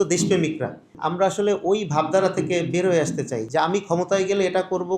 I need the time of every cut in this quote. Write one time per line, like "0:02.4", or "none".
0:01.0
0:03.4

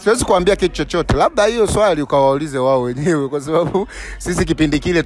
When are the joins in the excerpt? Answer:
none

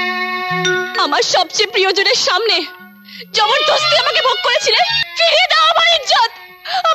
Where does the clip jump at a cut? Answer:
0:05.0

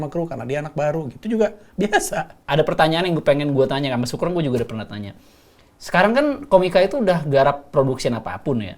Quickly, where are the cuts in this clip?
0:02.4

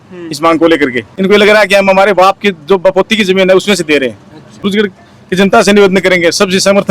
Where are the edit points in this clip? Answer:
0:01.1
0:04.6

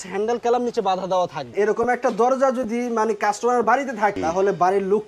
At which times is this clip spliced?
0:01.5
0:04.2

